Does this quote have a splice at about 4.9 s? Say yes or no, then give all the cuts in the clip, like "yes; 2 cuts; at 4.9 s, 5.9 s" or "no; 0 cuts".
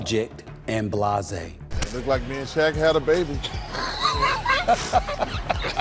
no; 1 cut; at 1.7 s